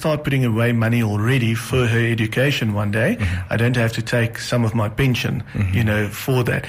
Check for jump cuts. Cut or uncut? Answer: uncut